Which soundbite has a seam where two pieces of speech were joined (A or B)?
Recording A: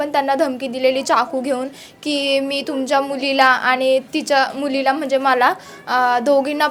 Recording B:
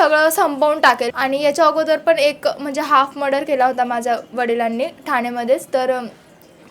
B